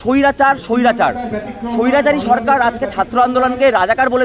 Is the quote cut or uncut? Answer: uncut